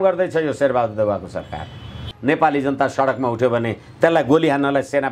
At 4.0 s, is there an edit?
no; 1 cut; at 2.1 s

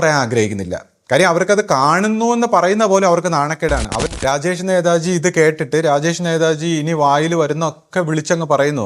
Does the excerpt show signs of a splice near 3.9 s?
yes; 1 cut; at 3.9 s

